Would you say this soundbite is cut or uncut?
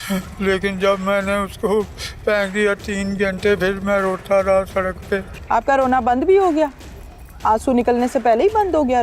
cut